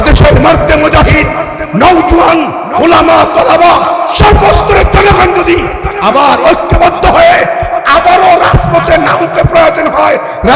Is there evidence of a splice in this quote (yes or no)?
no